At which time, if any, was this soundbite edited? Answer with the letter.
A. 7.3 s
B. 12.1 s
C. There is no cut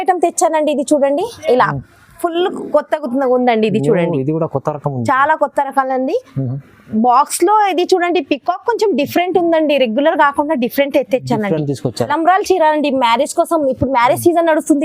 B